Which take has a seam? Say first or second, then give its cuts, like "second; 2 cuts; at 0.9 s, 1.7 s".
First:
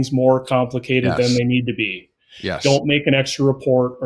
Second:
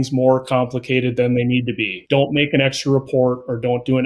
second; 1 cut; at 2.0 s